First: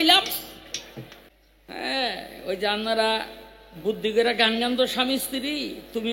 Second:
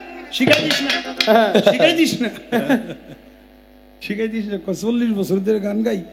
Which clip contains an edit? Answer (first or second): first